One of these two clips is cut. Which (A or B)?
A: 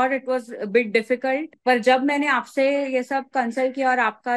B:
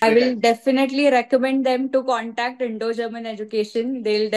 A